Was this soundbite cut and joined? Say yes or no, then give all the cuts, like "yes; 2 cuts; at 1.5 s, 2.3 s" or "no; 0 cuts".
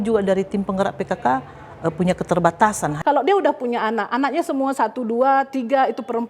yes; 1 cut; at 2.9 s